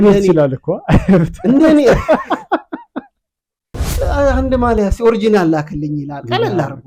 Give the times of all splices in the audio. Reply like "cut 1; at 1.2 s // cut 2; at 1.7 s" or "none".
cut 1; at 3.9 s

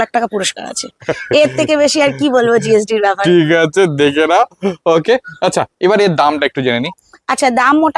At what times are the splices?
none

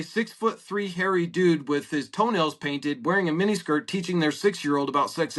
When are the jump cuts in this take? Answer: none

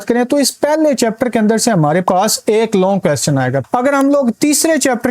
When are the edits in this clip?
cut 1; at 3.6 s

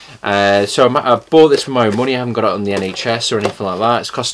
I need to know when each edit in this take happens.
cut 1; at 1.0 s

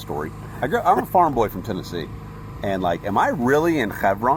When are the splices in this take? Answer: none

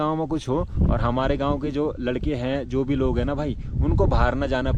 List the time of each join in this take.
none

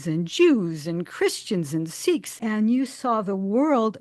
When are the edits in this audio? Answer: cut 1; at 2.3 s

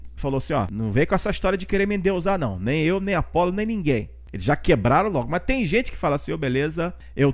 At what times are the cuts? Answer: none

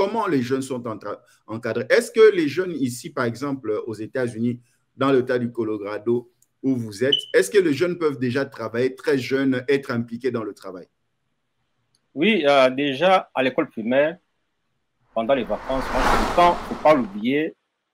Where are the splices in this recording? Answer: cut 1; at 16.0 s

